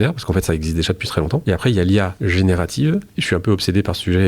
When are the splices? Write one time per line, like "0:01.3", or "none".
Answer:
0:01.4
0:02.1
0:03.1